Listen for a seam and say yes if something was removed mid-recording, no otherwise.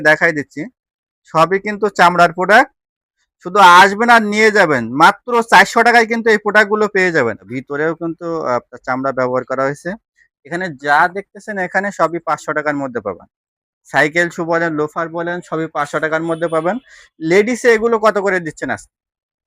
yes